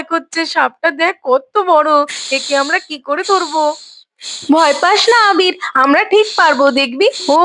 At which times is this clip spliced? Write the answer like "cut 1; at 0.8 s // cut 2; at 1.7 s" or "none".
none